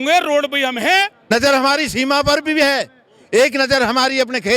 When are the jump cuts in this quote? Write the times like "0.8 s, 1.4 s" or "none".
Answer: 1.3 s